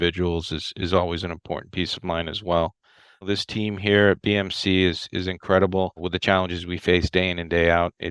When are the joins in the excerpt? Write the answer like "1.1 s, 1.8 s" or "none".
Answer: 3.2 s, 6.0 s